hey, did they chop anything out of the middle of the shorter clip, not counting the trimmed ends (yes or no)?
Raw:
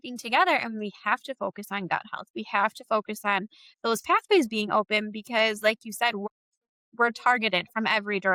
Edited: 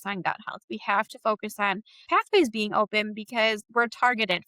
yes